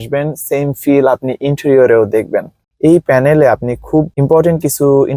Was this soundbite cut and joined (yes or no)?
yes